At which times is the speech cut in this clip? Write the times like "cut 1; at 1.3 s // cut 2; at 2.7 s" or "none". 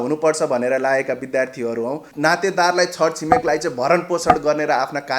cut 1; at 2.1 s